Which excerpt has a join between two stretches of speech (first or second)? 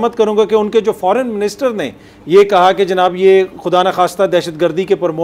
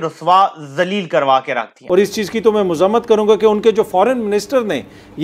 second